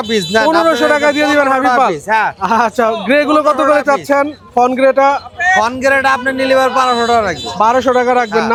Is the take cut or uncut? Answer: uncut